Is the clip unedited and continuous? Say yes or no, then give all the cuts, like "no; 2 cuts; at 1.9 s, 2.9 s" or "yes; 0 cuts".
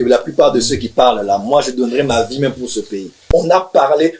no; 1 cut; at 3.1 s